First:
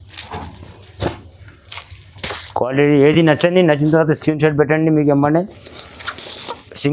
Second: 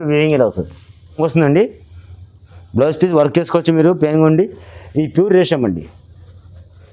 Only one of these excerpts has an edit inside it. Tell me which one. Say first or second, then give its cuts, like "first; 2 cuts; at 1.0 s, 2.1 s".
second; 1 cut; at 1.1 s